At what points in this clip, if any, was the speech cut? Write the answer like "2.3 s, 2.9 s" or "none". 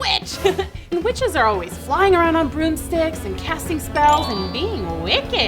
0.9 s